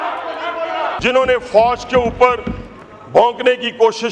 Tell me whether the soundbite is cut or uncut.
cut